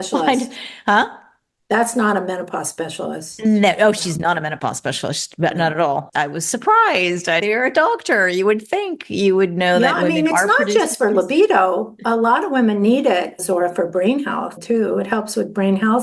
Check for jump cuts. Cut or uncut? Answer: cut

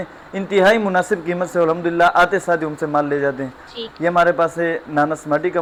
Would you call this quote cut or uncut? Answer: uncut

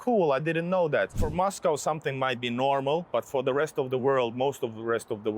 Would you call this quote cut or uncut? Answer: cut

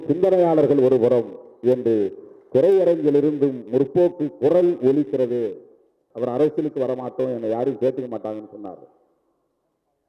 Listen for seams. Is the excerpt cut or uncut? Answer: cut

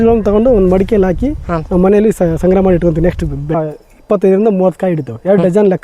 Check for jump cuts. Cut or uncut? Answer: cut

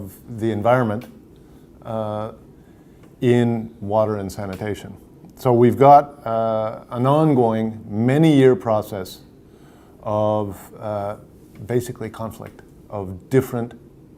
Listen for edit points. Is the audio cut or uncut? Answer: uncut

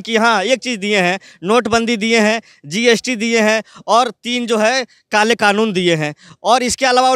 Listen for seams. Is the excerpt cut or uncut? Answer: uncut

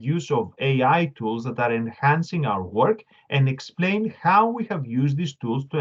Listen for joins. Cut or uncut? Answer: uncut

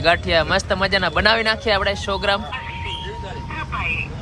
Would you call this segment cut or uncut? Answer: cut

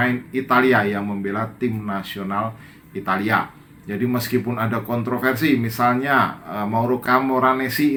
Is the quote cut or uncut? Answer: uncut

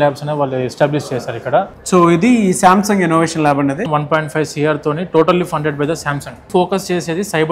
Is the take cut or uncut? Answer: cut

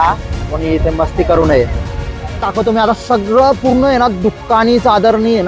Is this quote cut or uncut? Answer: cut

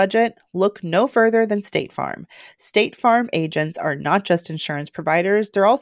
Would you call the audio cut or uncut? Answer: uncut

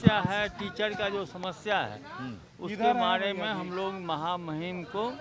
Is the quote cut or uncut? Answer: uncut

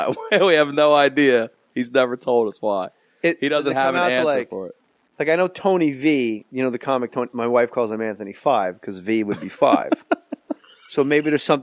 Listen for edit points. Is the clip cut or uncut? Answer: cut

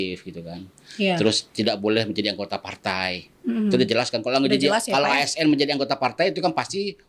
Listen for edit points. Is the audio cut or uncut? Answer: uncut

